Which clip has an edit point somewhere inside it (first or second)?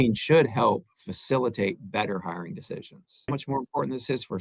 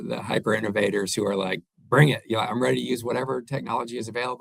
first